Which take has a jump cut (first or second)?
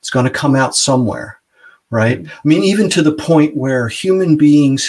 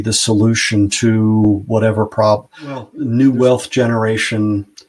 second